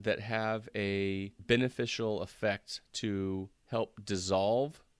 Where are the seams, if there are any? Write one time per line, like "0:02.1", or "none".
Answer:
0:01.3
0:03.6